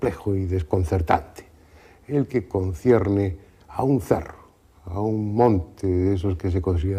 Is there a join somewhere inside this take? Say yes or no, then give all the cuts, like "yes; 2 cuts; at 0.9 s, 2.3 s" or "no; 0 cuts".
no; 0 cuts